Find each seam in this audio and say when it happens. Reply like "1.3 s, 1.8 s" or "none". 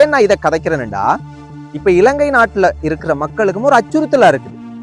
none